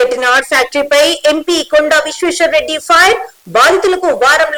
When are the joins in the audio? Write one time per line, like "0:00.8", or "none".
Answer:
none